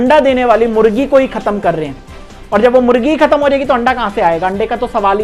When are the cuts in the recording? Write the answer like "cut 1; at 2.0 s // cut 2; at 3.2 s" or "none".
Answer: none

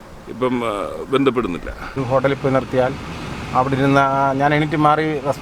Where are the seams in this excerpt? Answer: cut 1; at 2.0 s

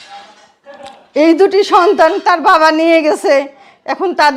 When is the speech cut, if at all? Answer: none

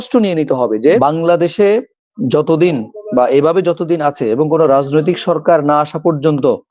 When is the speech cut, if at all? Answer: cut 1; at 1.0 s

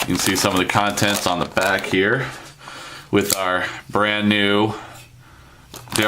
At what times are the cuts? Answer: cut 1; at 2.9 s

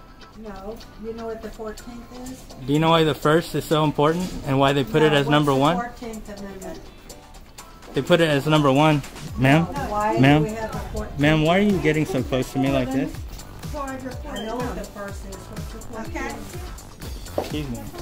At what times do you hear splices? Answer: none

